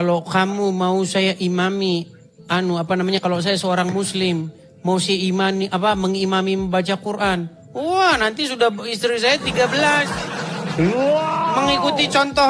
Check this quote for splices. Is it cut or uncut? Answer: uncut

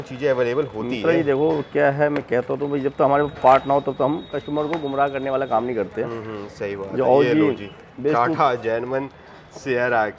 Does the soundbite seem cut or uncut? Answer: uncut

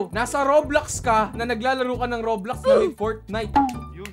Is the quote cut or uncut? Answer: uncut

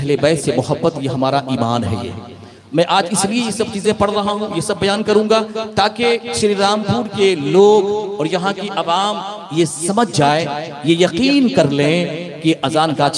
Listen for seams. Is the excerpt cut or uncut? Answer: uncut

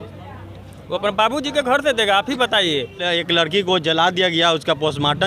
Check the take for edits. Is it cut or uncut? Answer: cut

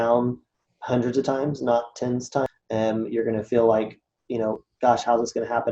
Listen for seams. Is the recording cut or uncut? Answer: cut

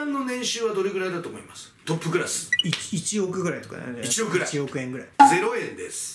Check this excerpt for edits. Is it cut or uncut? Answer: cut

